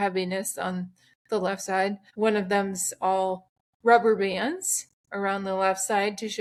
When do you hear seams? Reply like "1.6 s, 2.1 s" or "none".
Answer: none